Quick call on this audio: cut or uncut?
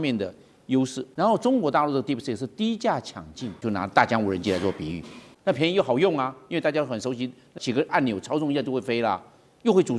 cut